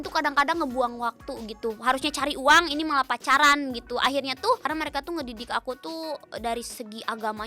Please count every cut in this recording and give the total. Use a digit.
1